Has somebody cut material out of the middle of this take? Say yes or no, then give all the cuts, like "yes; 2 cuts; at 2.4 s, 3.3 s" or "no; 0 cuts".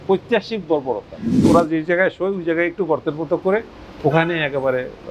yes; 1 cut; at 1.5 s